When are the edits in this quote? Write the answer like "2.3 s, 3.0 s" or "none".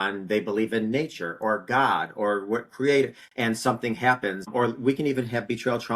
4.5 s